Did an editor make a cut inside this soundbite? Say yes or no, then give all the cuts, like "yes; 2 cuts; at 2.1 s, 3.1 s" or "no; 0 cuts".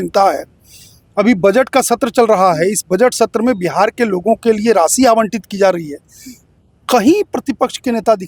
no; 0 cuts